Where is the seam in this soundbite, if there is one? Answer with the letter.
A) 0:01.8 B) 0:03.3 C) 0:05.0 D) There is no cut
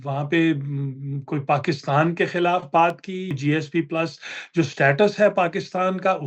B